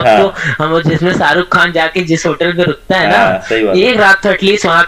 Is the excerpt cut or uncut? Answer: uncut